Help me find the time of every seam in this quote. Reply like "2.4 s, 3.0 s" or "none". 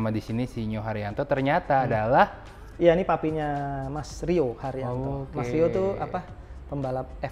none